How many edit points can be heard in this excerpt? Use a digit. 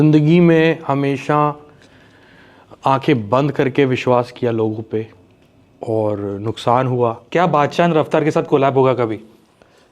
1